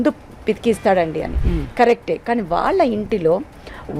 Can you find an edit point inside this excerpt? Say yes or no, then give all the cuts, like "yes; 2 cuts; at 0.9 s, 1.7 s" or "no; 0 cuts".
no; 0 cuts